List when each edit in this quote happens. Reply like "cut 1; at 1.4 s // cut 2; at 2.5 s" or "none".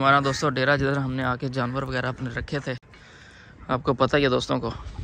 none